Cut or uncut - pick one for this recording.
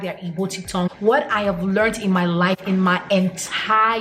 cut